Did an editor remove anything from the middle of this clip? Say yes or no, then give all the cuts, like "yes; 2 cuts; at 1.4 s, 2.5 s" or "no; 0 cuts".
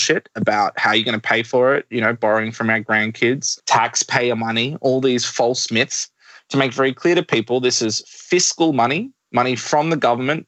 no; 0 cuts